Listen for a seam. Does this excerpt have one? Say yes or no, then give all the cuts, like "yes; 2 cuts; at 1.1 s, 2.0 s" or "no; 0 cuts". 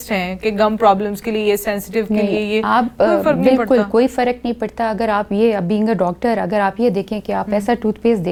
no; 0 cuts